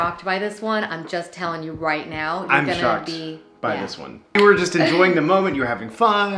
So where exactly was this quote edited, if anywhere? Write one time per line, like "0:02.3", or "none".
0:04.4